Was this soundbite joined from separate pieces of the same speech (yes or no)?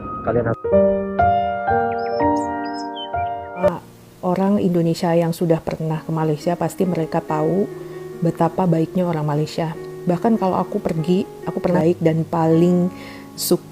yes